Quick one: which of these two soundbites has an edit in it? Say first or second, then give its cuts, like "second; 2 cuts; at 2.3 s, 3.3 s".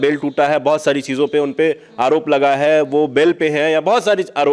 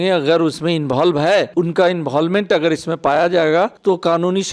second; 2 cuts; at 1.5 s, 3.8 s